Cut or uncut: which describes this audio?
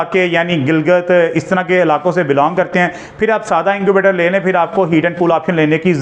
uncut